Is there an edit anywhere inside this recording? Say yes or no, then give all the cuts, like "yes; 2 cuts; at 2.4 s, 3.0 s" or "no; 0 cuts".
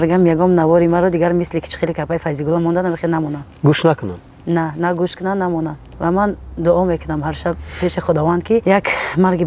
yes; 2 cuts; at 5.8 s, 8.6 s